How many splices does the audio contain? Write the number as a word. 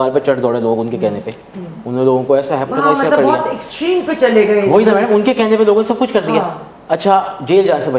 zero